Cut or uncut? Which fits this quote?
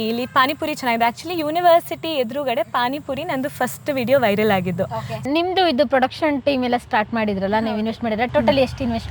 cut